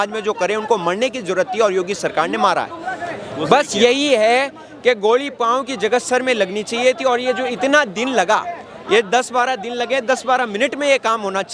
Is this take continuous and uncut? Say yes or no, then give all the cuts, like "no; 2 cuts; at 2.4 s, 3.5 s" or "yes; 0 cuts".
yes; 0 cuts